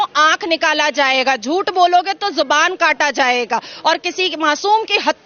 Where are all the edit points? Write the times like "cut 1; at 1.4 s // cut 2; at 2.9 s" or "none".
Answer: none